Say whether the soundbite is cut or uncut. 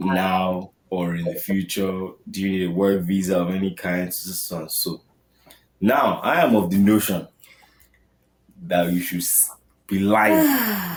uncut